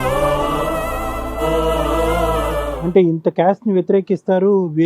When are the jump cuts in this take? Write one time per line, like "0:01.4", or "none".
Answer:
0:02.7